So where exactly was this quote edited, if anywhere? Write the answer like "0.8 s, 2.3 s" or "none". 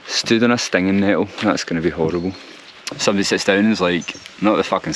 2.8 s